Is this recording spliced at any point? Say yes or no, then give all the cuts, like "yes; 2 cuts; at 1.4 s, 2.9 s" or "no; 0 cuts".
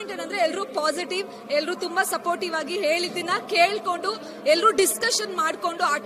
no; 0 cuts